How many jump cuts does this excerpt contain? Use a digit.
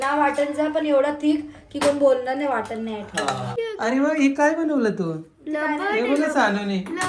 1